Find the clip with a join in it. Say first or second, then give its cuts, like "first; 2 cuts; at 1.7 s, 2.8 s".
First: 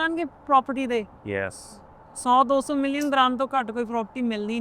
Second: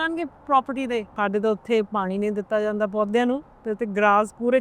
second; 1 cut; at 1.1 s